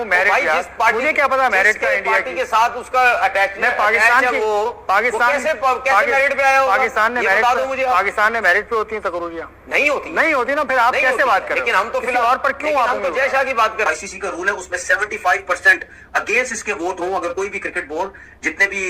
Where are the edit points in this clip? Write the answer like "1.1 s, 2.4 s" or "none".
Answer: 13.9 s